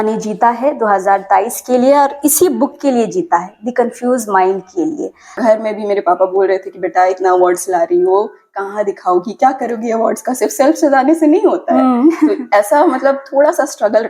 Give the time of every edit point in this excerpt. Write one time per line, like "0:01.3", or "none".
0:05.4

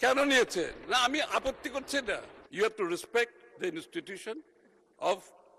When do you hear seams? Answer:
0:02.4

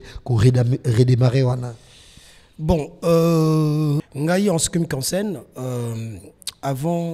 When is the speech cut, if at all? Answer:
0:04.0

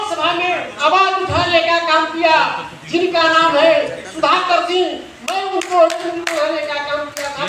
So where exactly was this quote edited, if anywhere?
none

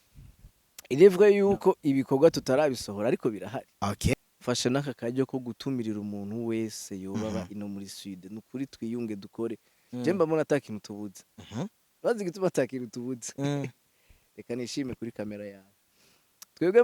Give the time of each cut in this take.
0:04.1

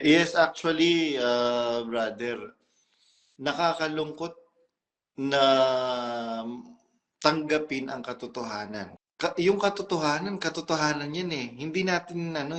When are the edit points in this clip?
0:08.9

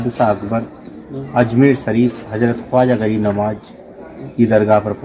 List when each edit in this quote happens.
none

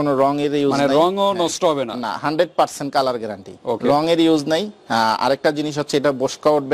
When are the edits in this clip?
none

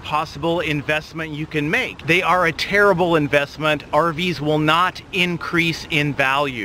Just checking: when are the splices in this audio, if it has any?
0:01.9

